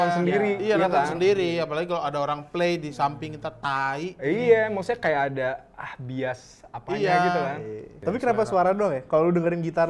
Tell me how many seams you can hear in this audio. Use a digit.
1